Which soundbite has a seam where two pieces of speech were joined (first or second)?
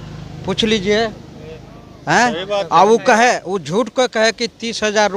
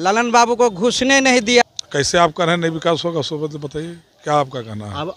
second